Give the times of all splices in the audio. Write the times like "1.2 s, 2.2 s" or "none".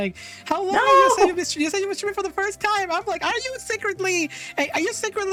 none